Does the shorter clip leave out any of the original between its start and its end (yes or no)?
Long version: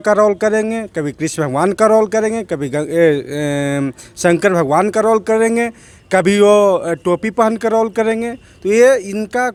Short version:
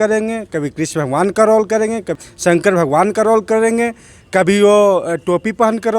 yes